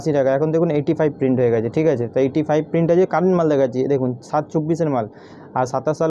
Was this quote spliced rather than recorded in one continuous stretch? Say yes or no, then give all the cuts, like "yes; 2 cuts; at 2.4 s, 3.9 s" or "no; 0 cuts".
no; 0 cuts